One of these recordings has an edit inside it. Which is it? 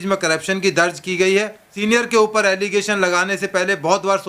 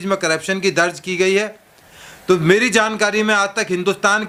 first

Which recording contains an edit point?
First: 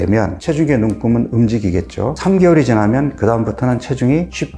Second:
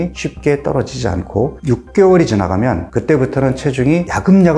first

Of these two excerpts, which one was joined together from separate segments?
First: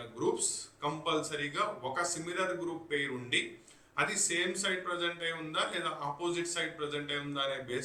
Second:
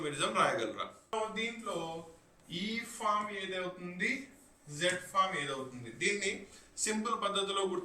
second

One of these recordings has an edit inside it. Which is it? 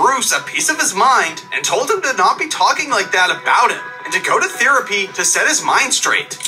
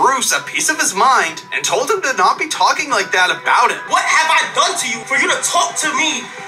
second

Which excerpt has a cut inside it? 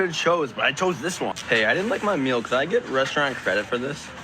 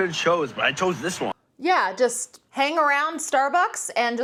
first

